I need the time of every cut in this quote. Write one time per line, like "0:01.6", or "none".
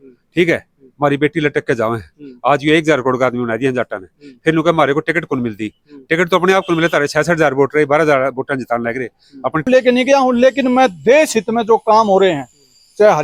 0:09.7